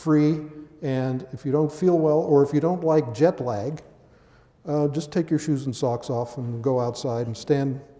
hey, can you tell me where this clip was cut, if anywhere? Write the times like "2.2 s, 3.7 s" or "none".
2.1 s